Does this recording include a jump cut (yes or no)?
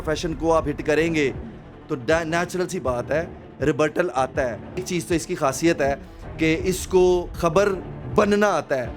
yes